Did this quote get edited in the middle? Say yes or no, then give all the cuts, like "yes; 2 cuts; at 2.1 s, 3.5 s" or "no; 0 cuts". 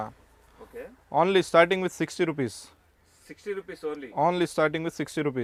no; 0 cuts